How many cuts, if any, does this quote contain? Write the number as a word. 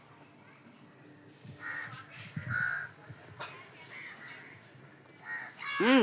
zero